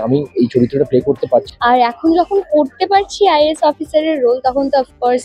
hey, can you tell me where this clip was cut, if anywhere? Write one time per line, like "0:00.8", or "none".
0:01.5